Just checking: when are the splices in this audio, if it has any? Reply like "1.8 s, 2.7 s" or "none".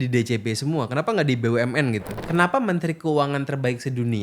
2.2 s